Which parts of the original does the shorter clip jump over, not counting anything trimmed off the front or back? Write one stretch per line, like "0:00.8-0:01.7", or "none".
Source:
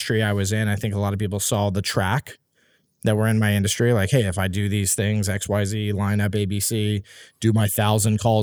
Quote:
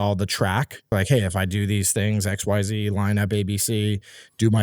0:02.5-0:03.9